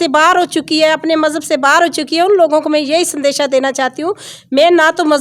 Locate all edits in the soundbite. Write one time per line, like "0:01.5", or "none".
none